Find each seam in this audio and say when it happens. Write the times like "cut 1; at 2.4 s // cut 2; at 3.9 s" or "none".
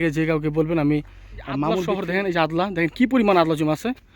cut 1; at 1.9 s